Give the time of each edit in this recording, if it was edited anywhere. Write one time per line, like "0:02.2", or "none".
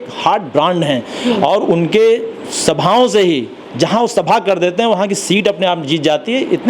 none